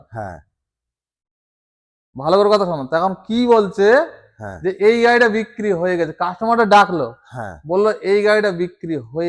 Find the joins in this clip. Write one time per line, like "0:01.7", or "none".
none